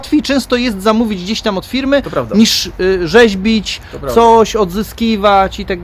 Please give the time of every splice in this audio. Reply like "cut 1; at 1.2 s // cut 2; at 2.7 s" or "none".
none